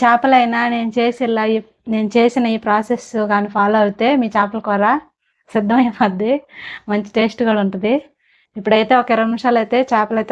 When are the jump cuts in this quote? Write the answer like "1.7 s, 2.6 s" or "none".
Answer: none